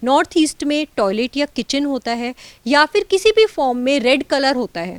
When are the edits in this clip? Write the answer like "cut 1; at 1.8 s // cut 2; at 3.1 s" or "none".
none

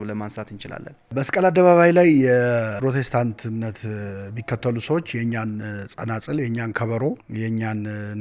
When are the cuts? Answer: cut 1; at 1.1 s // cut 2; at 2.7 s // cut 3; at 7.3 s

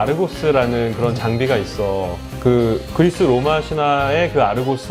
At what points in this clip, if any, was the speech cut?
none

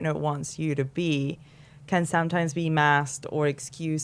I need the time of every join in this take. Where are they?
none

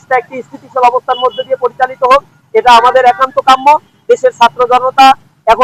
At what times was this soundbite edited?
none

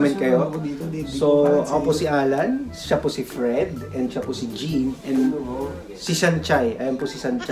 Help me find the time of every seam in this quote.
none

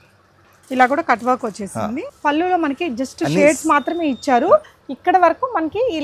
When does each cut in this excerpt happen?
cut 1; at 2.1 s

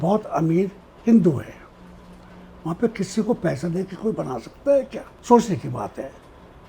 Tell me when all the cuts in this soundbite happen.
cut 1; at 5.1 s

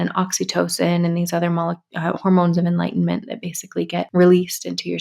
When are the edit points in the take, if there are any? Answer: cut 1; at 4.1 s

